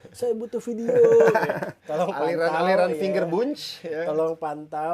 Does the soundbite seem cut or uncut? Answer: cut